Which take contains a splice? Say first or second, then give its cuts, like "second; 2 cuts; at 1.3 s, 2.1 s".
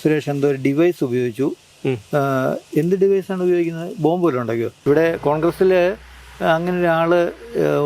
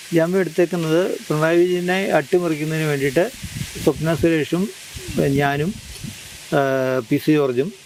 first; 1 cut; at 4.7 s